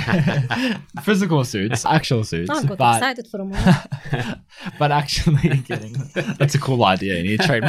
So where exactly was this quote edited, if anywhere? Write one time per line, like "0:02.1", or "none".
none